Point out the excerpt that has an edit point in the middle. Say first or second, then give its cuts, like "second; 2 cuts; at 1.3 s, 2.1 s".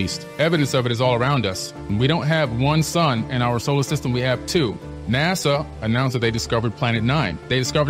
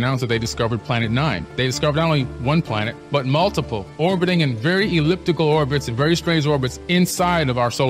first; 2 cuts; at 1.8 s, 4.9 s